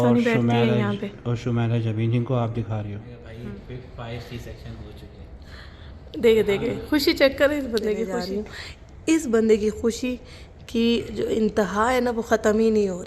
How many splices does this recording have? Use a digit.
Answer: 2